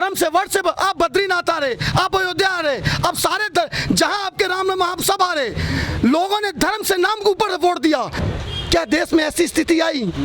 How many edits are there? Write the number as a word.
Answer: one